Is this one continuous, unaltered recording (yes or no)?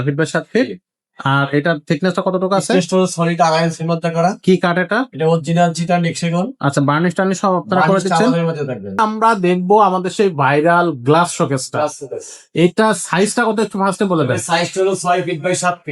no